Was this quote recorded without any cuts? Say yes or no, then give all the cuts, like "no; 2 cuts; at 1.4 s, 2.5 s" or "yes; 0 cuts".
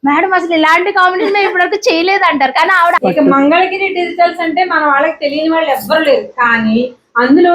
no; 1 cut; at 3.0 s